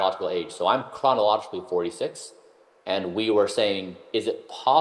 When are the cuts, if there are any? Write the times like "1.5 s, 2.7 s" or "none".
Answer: none